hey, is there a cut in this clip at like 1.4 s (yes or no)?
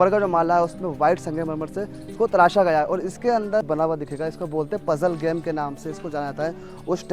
no